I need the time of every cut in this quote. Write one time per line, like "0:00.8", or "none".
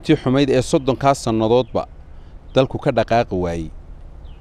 none